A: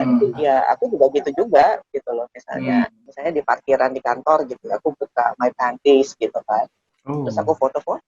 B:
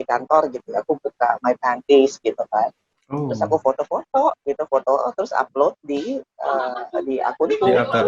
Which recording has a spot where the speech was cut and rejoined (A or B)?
A